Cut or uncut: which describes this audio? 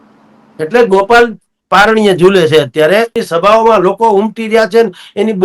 cut